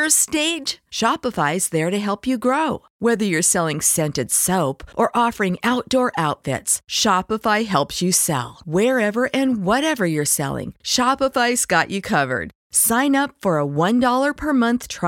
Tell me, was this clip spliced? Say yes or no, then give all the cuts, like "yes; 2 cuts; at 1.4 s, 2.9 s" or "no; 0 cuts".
no; 0 cuts